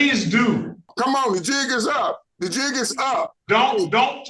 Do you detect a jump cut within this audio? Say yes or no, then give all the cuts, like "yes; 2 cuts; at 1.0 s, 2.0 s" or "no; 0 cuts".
yes; 3 cuts; at 0.9 s, 2.3 s, 3.4 s